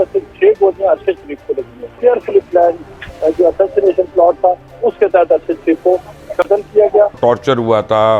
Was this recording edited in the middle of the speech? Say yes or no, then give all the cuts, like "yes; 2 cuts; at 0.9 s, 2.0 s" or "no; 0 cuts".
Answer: yes; 2 cuts; at 1.8 s, 7.2 s